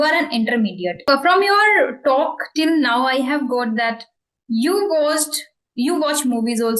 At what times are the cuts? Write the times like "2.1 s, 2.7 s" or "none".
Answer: 1.1 s